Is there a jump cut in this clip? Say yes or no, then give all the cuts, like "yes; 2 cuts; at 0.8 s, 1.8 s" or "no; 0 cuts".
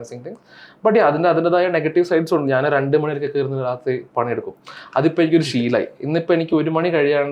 no; 0 cuts